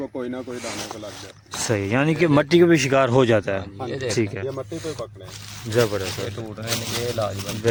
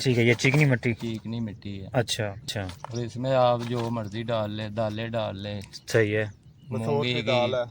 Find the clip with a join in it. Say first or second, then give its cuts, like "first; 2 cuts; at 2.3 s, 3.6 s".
second; 1 cut; at 2.5 s